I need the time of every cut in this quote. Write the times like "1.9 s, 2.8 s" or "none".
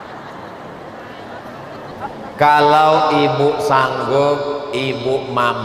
1.9 s